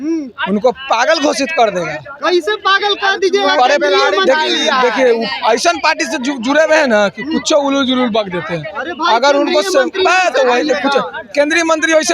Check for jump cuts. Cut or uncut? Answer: uncut